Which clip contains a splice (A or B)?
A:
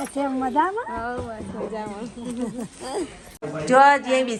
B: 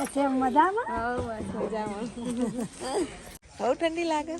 B